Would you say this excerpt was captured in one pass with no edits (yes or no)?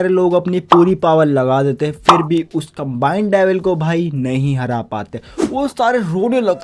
yes